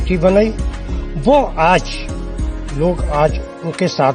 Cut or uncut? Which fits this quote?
uncut